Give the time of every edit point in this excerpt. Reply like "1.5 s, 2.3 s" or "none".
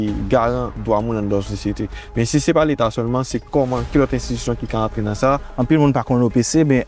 5.5 s